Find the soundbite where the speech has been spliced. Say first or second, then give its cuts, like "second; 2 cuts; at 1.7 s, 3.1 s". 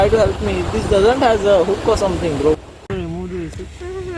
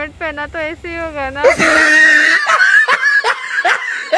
second; 1 cut; at 1.4 s